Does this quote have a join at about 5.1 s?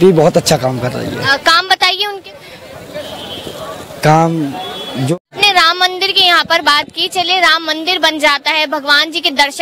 yes; 1 cut; at 5.1 s

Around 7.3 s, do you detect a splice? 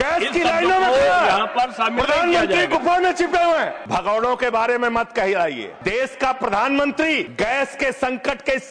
yes; 3 cuts; at 3.8 s, 5.7 s, 7.3 s

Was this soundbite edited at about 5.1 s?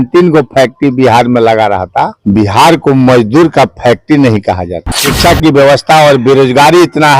yes; 2 cuts; at 2.2 s, 5.1 s

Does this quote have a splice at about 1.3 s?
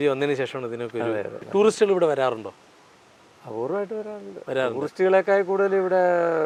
no; 0 cuts

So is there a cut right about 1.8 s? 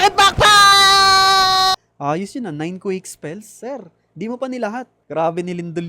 yes; 2 cuts; at 1.8 s, 5.0 s

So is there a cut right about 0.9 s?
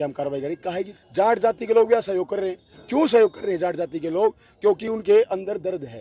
yes; 1 cut; at 0.9 s

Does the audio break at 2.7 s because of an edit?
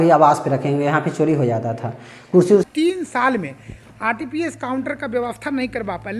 yes; 1 cut; at 2.7 s

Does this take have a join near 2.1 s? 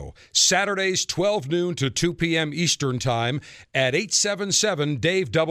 no; 0 cuts

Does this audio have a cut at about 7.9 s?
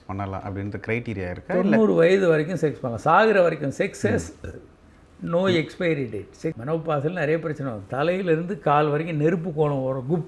no; 1 cut; at 6.6 s

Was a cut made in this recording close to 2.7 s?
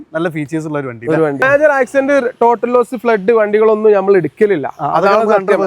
no; 1 cut; at 1.4 s

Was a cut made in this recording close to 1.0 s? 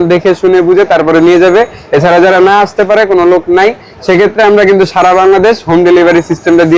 no; 0 cuts

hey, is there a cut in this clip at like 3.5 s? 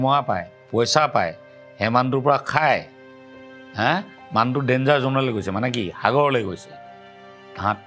no; 0 cuts

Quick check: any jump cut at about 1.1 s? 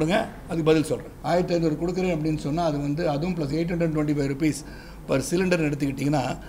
yes; 1 cut; at 1.1 s

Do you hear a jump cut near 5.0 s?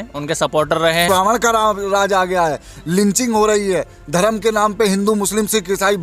no; 1 cut; at 1.1 s

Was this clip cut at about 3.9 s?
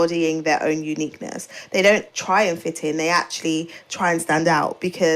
no; 1 cut; at 2.1 s

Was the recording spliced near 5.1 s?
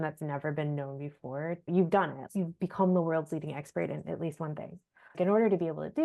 yes; 3 cuts; at 1.6 s, 2.2 s, 5.1 s

